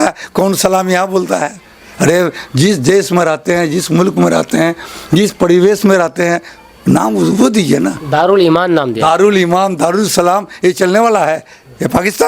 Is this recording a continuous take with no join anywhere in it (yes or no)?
yes